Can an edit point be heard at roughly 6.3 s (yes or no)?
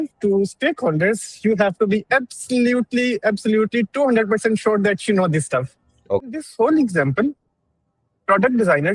yes